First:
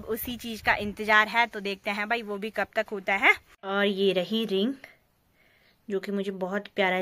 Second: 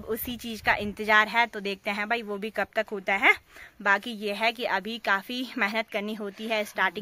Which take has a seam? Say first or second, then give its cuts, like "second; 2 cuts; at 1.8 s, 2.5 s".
first; 1 cut; at 3.5 s